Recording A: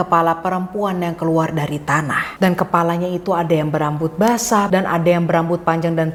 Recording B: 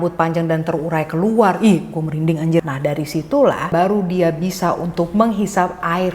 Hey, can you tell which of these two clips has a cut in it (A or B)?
B